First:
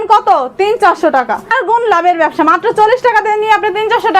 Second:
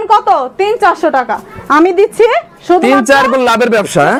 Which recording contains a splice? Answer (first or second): first